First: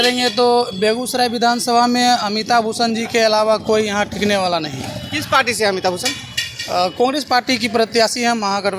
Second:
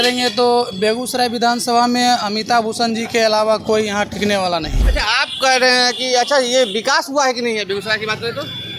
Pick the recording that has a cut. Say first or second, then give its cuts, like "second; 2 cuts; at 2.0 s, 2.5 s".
second; 1 cut; at 4.8 s